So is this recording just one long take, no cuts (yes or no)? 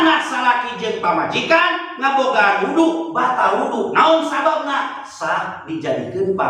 yes